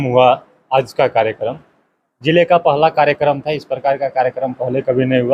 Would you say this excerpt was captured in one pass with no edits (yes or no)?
yes